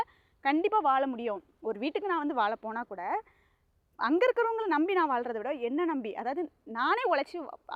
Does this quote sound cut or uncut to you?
uncut